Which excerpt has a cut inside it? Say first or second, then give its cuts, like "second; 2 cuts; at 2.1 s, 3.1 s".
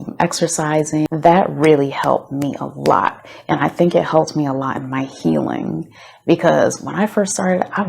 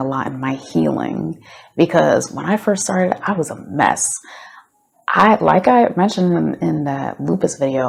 first; 1 cut; at 1.1 s